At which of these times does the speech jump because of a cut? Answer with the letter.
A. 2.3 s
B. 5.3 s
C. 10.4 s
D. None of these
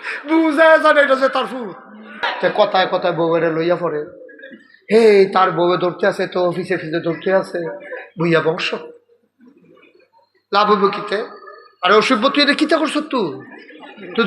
A